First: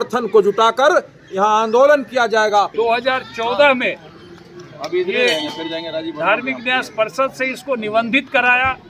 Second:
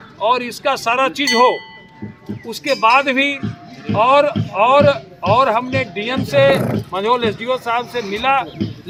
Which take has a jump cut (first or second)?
first